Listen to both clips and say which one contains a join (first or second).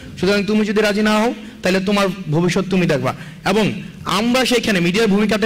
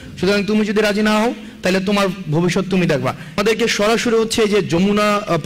second